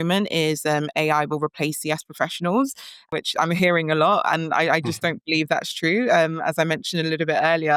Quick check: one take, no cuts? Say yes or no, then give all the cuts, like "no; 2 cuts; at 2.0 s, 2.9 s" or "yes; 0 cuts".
yes; 0 cuts